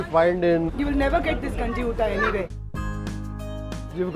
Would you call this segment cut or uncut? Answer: cut